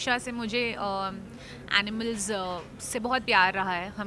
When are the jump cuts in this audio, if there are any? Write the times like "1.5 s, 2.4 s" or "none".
none

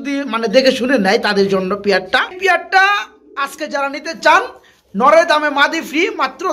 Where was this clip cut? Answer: 2.3 s

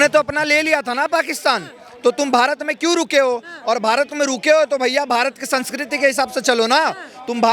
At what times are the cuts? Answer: none

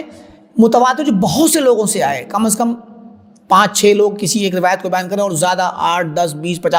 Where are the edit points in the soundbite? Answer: none

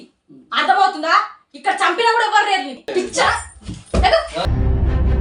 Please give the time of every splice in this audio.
2.8 s

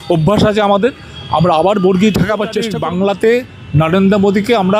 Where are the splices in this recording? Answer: 2.7 s

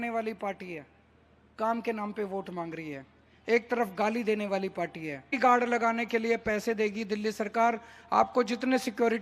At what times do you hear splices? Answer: 5.3 s

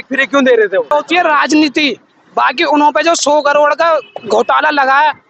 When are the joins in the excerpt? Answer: 0.9 s

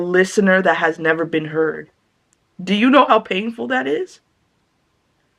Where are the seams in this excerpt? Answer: none

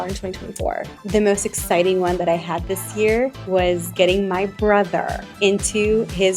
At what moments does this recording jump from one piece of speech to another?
0.9 s, 3.4 s, 5.2 s

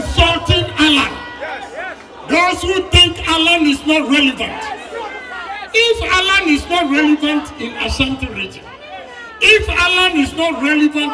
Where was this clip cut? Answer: none

